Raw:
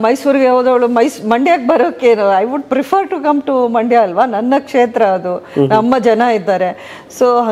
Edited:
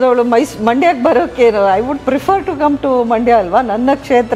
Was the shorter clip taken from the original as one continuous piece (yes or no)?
yes